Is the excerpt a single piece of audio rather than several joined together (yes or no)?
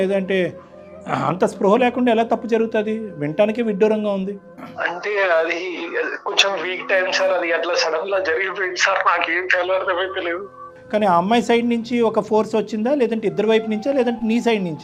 yes